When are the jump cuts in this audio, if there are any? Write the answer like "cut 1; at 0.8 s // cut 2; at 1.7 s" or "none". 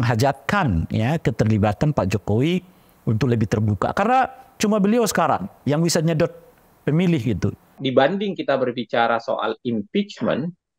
cut 1; at 7.8 s